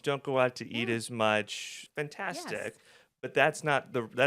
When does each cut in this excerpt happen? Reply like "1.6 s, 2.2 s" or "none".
1.9 s